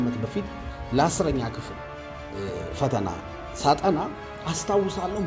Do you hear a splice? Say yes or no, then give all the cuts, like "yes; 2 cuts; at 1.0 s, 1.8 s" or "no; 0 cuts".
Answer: no; 0 cuts